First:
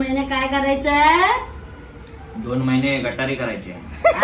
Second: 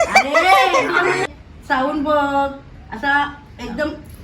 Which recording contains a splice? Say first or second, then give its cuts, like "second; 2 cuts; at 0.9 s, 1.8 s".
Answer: second; 1 cut; at 1.3 s